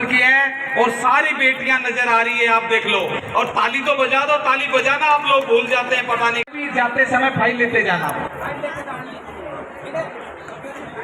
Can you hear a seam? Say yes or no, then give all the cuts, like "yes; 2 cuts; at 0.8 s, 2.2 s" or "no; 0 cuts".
yes; 1 cut; at 6.5 s